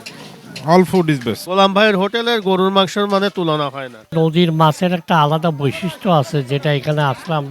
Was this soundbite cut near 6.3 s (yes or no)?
no